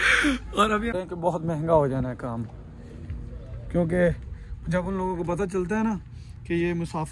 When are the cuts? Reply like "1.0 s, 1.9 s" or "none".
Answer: 0.9 s